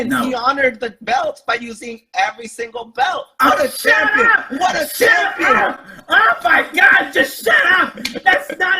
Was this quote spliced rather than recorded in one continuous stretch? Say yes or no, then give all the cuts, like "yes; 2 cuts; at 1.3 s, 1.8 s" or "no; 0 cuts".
no; 0 cuts